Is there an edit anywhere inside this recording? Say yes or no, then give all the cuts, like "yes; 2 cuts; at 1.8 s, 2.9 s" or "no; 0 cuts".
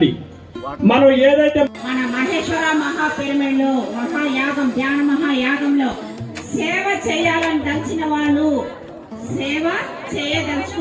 yes; 1 cut; at 1.7 s